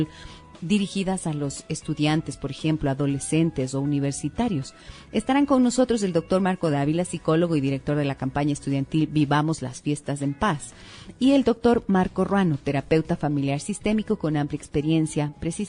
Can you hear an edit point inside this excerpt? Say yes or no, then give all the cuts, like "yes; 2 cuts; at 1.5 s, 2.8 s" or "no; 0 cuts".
yes; 1 cut; at 10.9 s